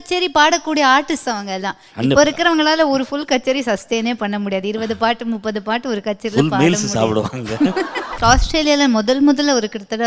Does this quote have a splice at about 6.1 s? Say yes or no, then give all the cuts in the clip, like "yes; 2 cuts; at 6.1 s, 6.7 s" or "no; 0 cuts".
no; 1 cut; at 8.2 s